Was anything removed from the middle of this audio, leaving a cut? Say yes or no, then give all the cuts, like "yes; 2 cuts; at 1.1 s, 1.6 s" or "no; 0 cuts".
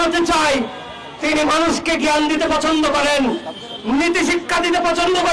no; 0 cuts